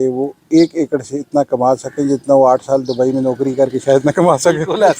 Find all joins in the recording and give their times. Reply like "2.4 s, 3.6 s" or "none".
none